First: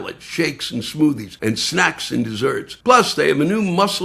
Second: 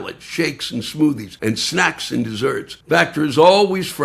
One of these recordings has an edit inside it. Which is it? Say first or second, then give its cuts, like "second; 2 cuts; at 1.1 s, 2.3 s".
second; 1 cut; at 2.7 s